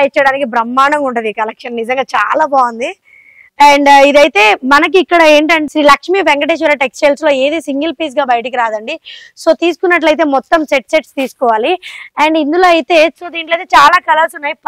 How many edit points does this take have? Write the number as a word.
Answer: zero